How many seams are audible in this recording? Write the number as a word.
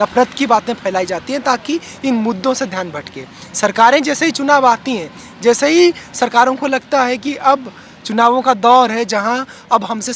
zero